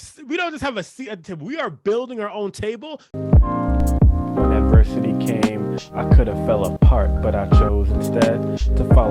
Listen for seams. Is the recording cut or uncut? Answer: cut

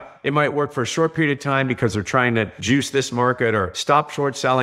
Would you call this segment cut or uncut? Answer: cut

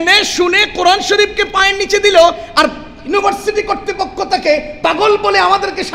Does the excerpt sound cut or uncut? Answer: uncut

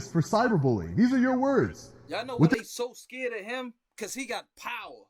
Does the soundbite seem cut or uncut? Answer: uncut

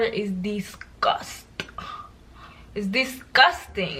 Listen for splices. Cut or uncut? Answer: uncut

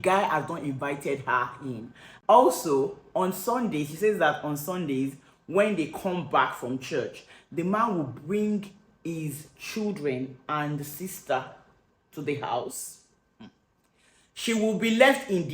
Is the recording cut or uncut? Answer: cut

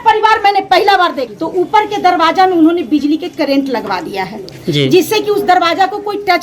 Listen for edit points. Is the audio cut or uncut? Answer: cut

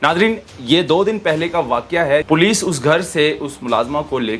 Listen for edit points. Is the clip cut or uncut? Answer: cut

